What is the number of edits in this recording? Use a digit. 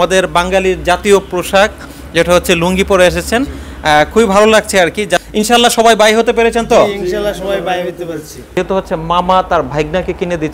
2